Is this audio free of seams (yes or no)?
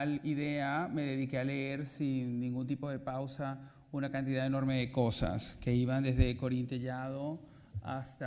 no